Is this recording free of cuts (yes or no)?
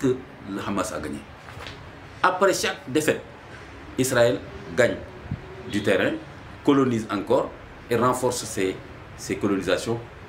yes